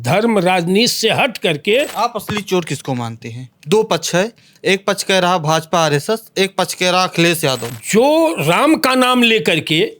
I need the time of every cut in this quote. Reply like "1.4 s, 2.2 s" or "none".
1.9 s, 7.7 s